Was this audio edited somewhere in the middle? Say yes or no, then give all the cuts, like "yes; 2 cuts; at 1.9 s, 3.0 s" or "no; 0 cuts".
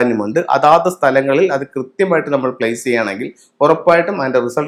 no; 0 cuts